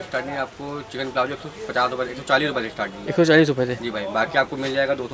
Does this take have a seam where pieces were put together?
no; 0 cuts

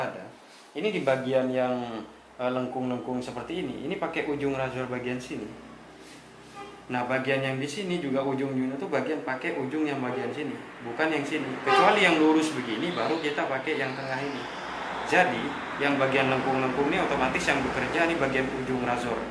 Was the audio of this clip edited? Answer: no; 0 cuts

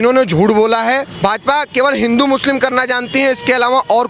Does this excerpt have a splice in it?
yes; 1 cut; at 1.1 s

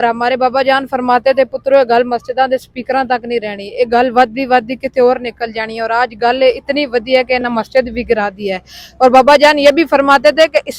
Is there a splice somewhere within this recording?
no; 0 cuts

